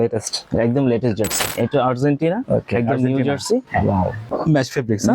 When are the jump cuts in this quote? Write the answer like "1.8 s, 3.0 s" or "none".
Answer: 1.4 s, 4.2 s